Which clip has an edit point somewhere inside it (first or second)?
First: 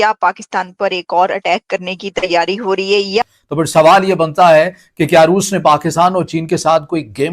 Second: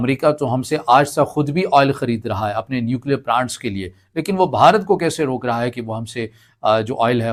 first